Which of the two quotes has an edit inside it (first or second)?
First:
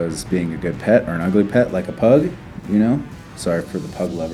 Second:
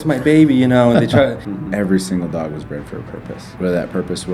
second